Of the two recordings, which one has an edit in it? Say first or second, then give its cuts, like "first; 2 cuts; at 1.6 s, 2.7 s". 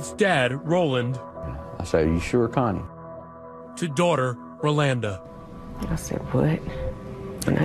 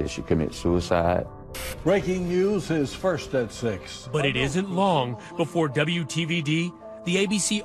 first; 1 cut; at 5.0 s